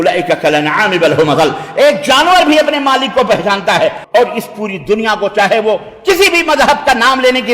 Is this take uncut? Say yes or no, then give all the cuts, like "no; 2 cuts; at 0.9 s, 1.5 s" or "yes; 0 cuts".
no; 1 cut; at 4.0 s